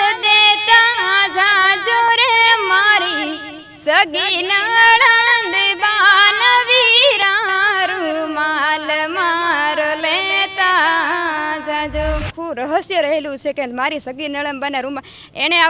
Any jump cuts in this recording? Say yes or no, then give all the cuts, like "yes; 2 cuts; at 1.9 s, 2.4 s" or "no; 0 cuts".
yes; 1 cut; at 12.4 s